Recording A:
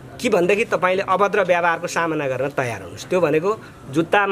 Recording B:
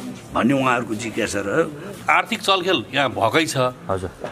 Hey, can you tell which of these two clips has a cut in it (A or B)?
B